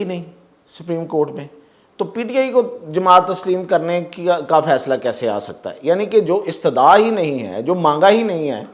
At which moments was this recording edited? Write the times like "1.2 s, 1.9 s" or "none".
none